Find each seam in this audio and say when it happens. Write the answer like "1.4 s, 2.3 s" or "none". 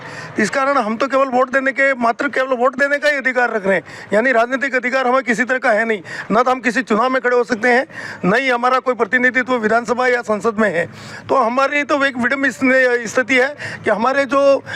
none